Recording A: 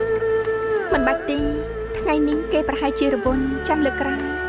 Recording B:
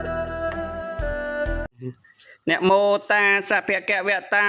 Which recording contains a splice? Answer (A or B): B